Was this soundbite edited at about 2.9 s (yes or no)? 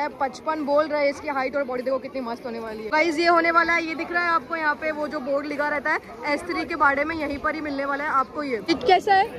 yes